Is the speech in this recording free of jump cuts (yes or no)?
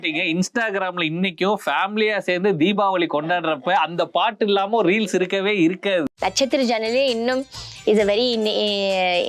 no